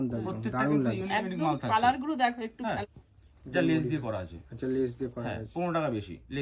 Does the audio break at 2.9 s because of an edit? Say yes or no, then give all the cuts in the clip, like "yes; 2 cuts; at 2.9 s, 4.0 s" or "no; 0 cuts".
yes; 1 cut; at 2.9 s